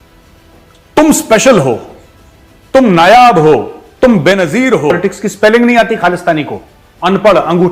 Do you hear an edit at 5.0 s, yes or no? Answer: yes